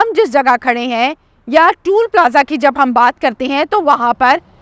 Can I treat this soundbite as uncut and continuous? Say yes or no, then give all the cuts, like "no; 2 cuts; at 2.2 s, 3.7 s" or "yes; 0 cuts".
yes; 0 cuts